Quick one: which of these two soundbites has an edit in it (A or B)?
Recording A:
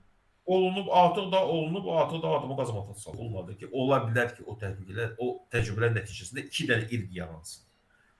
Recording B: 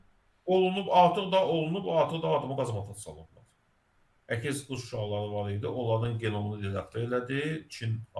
A